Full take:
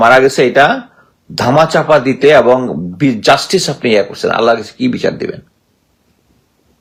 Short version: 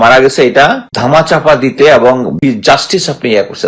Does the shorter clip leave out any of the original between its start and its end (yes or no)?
yes